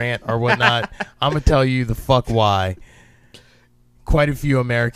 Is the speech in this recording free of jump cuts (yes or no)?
no